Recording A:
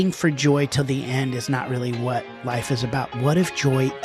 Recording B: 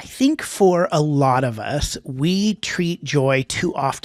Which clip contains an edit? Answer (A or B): A